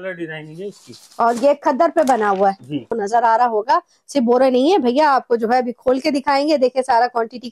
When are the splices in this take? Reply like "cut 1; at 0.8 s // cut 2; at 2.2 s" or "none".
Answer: cut 1; at 2.9 s